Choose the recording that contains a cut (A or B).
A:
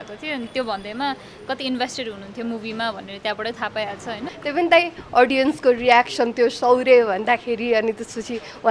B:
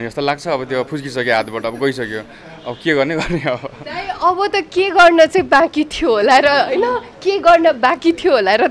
A